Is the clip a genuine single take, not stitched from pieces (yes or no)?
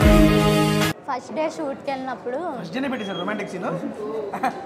no